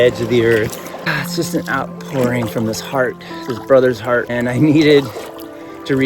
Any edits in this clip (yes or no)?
yes